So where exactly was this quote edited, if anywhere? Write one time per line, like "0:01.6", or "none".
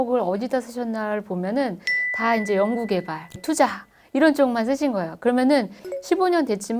0:03.4
0:05.9